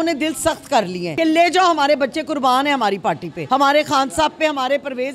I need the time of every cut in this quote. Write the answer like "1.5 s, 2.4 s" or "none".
1.0 s, 3.3 s